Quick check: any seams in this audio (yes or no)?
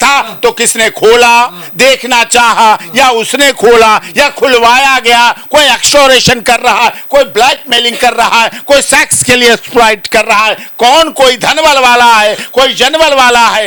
no